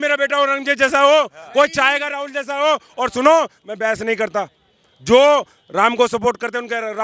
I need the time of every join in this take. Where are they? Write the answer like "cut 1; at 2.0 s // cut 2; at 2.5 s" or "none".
none